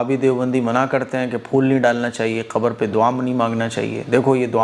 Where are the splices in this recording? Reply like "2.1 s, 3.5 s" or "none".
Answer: none